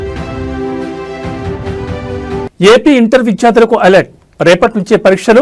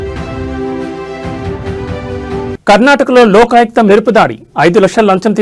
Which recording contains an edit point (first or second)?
second